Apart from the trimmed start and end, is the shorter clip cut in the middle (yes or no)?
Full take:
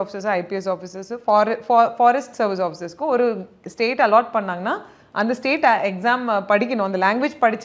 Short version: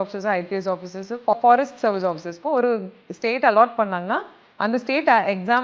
yes